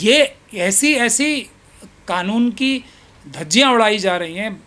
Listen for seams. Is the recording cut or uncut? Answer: uncut